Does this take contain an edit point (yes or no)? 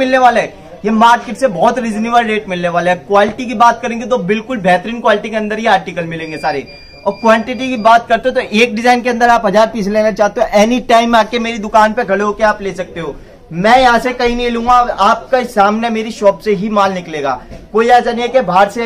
no